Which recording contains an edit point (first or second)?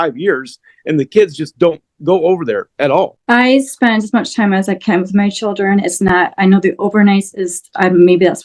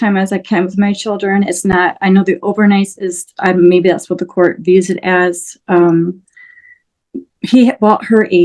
first